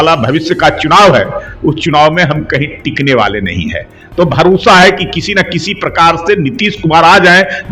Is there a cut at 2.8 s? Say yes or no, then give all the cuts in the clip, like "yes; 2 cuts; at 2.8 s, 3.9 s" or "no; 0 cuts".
no; 0 cuts